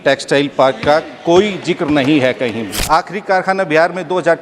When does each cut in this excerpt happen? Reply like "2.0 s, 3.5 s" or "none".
2.8 s